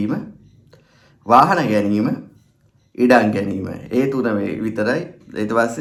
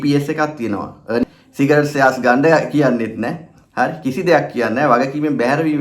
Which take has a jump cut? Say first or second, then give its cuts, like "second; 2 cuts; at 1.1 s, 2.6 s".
second; 1 cut; at 1.2 s